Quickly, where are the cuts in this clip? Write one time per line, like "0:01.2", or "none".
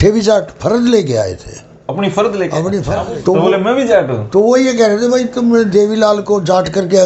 0:02.9